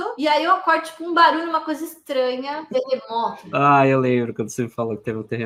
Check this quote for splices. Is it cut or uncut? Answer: uncut